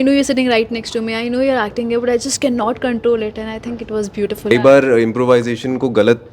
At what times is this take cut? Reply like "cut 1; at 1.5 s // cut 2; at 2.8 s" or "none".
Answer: cut 1; at 4.5 s